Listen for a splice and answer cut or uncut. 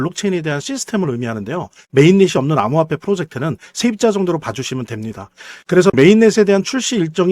cut